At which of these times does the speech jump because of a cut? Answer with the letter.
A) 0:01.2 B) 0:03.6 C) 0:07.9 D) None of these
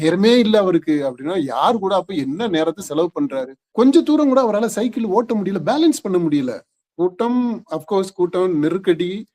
B